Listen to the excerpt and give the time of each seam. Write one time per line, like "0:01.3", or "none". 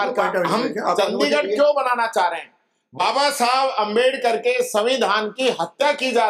none